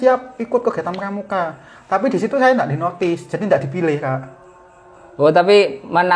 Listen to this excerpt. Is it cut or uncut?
uncut